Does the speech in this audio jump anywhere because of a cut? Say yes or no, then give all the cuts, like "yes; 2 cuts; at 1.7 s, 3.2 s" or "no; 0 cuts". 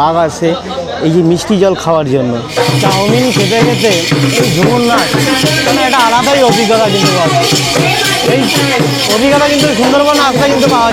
yes; 1 cut; at 2.5 s